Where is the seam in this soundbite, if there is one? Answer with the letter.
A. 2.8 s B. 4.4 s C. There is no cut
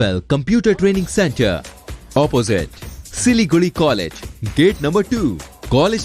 C